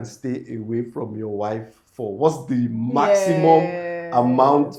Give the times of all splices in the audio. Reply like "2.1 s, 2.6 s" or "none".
none